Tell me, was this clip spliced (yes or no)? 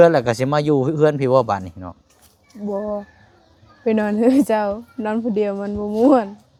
no